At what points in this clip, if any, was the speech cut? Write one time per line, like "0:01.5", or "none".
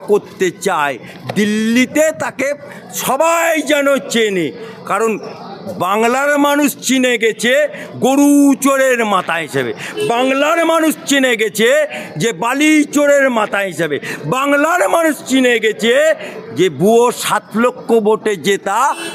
none